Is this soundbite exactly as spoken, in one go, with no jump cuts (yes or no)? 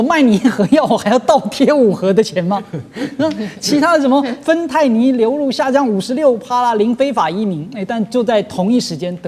yes